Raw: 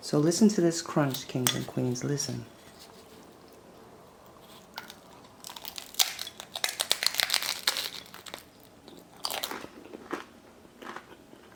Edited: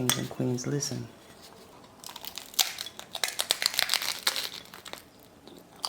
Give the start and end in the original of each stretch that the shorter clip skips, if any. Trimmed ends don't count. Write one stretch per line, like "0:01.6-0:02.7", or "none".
0:03.1-0:05.1